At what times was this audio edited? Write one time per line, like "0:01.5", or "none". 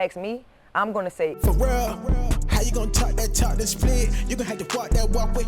0:01.4